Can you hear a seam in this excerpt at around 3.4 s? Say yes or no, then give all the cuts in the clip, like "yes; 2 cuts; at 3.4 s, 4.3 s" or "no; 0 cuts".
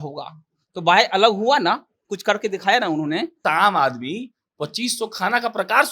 yes; 1 cut; at 3.4 s